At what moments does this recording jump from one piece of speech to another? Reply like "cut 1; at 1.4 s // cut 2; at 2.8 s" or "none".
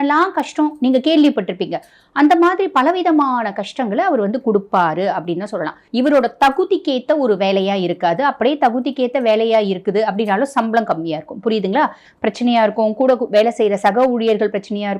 cut 1; at 5.8 s // cut 2; at 12.0 s